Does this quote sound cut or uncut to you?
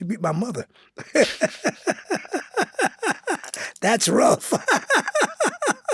uncut